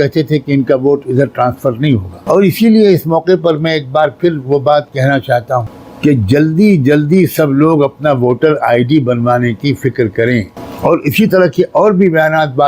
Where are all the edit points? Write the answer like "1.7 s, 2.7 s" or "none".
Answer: 2.1 s, 5.8 s, 10.6 s